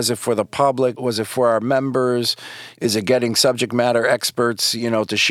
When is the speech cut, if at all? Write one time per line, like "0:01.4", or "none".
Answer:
0:01.0